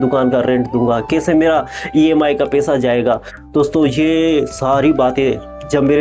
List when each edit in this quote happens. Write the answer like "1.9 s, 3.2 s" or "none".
none